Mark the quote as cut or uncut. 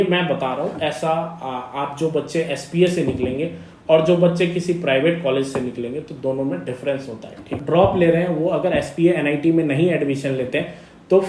cut